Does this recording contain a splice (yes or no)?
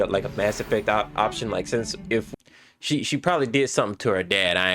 yes